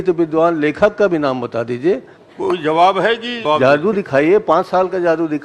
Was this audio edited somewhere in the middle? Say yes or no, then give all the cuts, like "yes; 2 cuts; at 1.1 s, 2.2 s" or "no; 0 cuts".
yes; 2 cuts; at 2.1 s, 3.4 s